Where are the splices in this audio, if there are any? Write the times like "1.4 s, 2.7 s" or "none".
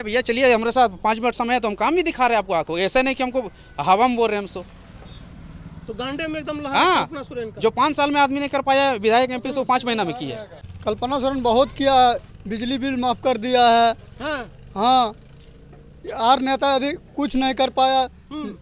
10.5 s